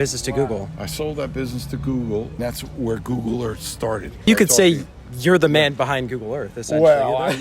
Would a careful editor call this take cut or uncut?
cut